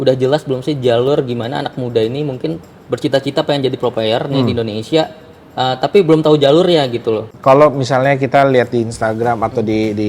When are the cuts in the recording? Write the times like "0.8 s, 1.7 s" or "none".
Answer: 7.3 s